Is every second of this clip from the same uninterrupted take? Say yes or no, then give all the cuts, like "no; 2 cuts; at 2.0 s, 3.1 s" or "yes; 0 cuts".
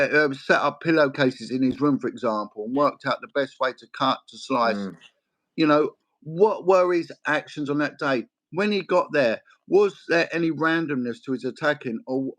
yes; 0 cuts